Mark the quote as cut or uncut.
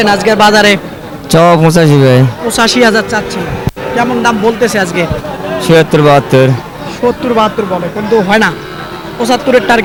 uncut